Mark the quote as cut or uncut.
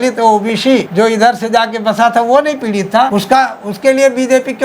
cut